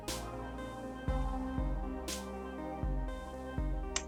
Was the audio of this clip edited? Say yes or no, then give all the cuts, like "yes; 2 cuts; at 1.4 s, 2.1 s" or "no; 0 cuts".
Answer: no; 0 cuts